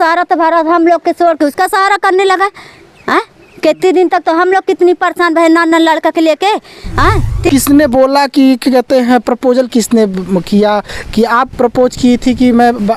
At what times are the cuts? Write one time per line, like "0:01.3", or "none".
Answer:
0:07.5

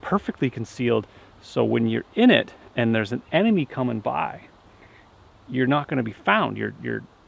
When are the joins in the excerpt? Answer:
none

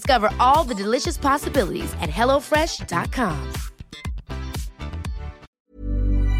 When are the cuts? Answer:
0:05.5

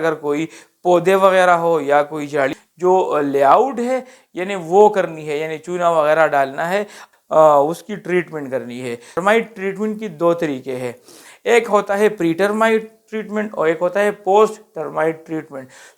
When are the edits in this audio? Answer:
0:02.5
0:07.0

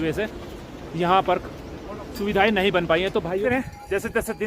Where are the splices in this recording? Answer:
0:03.4

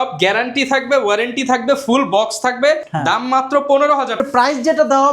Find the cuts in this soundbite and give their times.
0:04.2

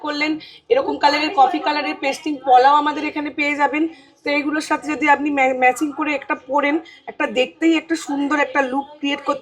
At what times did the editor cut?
none

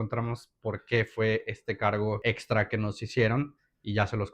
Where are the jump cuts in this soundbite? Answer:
0:02.2

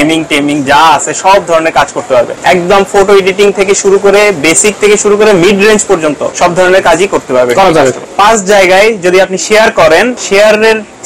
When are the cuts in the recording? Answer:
0:02.3
0:06.3
0:08.1
0:10.2

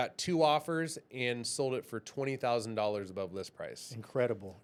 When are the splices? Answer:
none

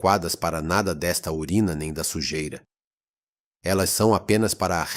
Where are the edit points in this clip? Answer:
none

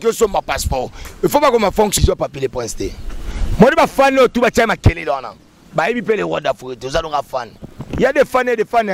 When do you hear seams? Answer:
0:01.9

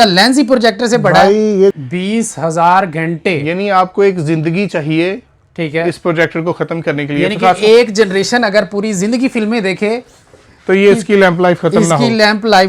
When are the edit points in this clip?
0:01.7

